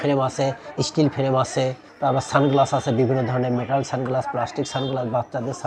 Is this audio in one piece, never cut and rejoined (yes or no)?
yes